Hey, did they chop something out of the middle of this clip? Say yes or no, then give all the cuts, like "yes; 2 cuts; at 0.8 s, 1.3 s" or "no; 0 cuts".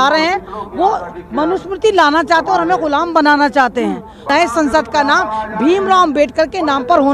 yes; 1 cut; at 4.3 s